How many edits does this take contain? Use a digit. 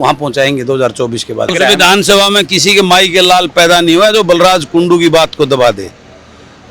1